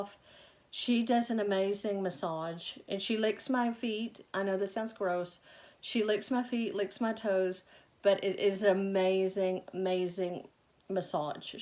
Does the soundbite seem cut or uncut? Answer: uncut